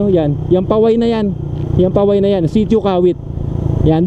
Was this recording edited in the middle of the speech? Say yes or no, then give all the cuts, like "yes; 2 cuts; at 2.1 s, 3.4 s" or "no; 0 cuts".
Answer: no; 0 cuts